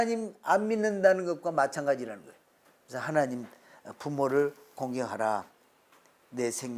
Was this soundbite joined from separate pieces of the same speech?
no; 0 cuts

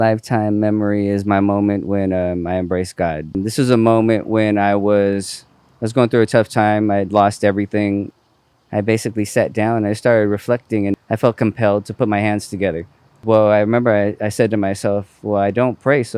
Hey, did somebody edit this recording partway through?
yes; 4 cuts; at 3.3 s, 8.1 s, 11.0 s, 13.2 s

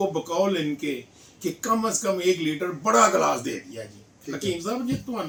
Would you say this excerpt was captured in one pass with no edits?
yes; 0 cuts

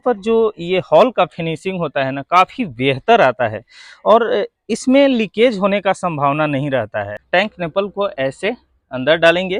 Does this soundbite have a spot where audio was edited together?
yes; 1 cut; at 7.2 s

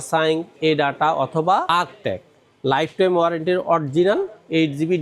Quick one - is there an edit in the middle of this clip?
no; 0 cuts

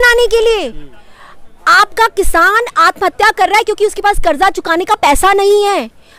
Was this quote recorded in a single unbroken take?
yes; 0 cuts

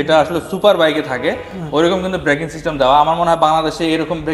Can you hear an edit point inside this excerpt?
no; 0 cuts

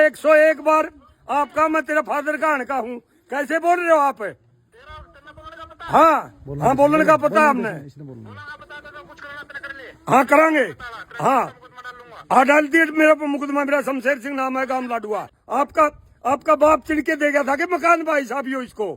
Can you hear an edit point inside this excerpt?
yes; 1 cut; at 15.4 s

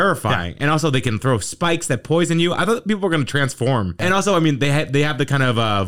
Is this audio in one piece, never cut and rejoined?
no; 1 cut; at 3.9 s

